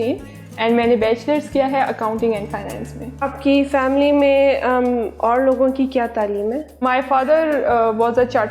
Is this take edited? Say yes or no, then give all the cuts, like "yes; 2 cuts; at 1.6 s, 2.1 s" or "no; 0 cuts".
no; 0 cuts